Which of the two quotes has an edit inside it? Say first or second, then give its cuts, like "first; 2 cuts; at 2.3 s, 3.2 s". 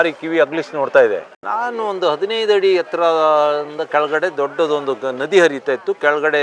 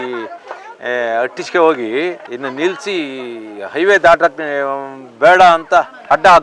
first; 1 cut; at 1.3 s